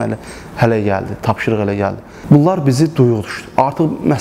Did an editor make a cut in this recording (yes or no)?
yes